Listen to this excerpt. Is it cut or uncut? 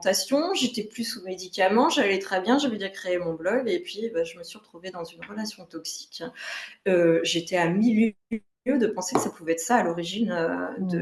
uncut